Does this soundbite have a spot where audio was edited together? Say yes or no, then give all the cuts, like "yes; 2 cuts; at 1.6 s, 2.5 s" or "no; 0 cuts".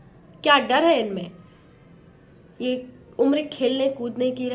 no; 0 cuts